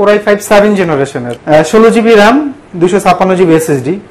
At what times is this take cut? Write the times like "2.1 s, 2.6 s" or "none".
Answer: 1.2 s